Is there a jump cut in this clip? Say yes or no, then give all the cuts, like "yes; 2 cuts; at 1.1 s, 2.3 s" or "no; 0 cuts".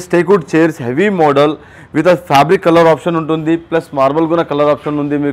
no; 0 cuts